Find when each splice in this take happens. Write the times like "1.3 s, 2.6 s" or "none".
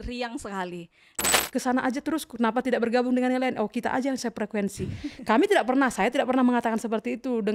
1.4 s